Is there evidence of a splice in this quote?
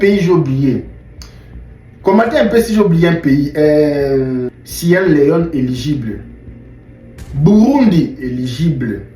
yes; 1 cut; at 4.6 s

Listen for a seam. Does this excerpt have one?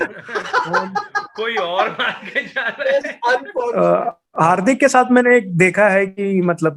yes; 1 cut; at 3.7 s

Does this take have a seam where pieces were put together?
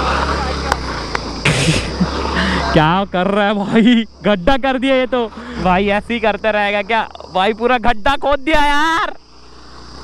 yes; 1 cut; at 5.5 s

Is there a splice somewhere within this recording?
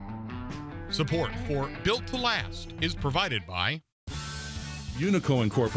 yes; 1 cut; at 1.0 s

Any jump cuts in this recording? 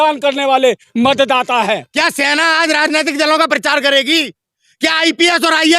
yes; 1 cut; at 1.9 s

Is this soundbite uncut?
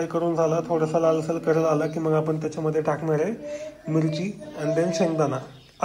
yes; 0 cuts

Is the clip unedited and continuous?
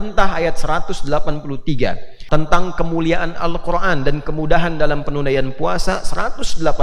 no; 1 cut; at 2.1 s

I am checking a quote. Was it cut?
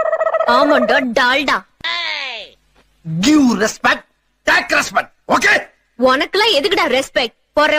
no; 0 cuts

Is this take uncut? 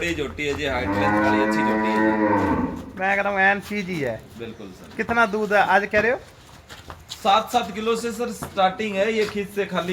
yes; 0 cuts

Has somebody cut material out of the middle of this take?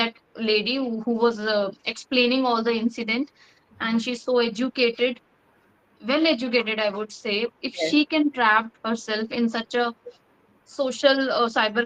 no; 0 cuts

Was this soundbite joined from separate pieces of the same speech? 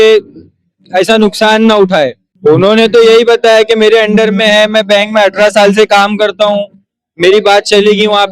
yes; 1 cut; at 2.2 s

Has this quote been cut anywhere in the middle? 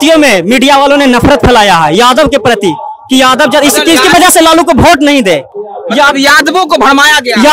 no; 0 cuts

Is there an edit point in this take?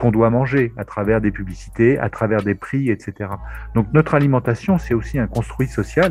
no; 0 cuts

